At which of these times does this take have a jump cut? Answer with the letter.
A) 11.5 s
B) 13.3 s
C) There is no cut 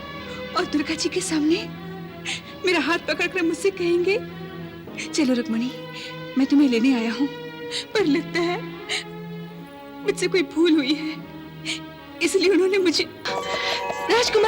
B